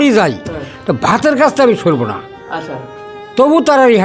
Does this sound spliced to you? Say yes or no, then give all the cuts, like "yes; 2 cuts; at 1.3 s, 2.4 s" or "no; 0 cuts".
no; 0 cuts